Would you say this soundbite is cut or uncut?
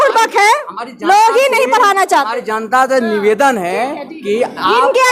uncut